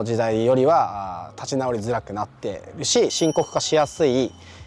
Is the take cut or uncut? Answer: uncut